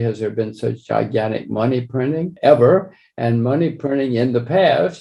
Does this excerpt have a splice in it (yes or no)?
no